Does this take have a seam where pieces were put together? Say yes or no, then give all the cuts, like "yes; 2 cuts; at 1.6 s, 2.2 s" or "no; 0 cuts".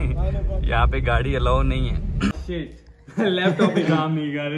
yes; 1 cut; at 2.3 s